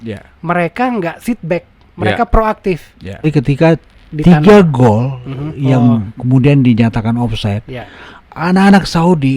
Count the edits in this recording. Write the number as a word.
one